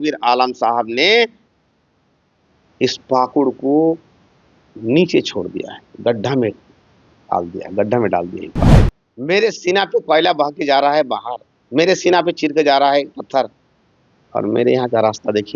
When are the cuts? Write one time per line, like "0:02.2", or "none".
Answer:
0:08.7